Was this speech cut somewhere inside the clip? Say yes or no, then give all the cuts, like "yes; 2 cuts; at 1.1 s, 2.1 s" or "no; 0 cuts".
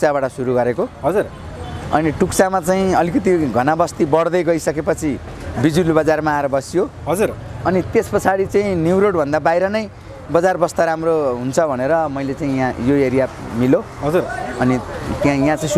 no; 0 cuts